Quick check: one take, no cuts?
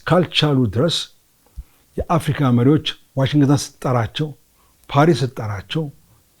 yes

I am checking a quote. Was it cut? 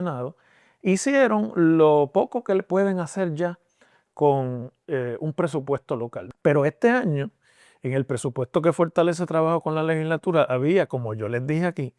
yes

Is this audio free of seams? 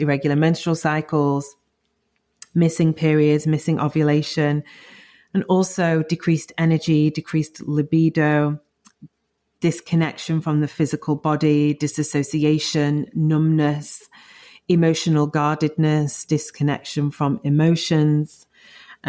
yes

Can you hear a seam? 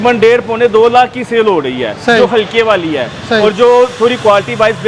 no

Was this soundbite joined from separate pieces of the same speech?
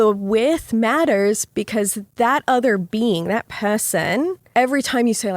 yes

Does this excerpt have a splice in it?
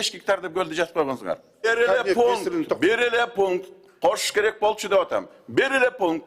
yes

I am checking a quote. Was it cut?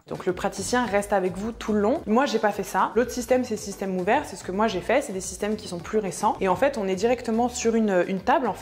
yes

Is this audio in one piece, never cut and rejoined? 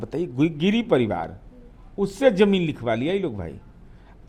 yes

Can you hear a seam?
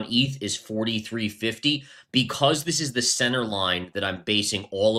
no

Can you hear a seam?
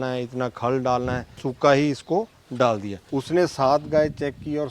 yes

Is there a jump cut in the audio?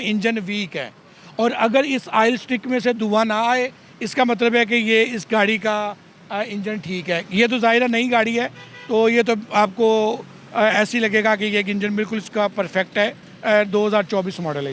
no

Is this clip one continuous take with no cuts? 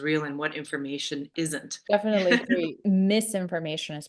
no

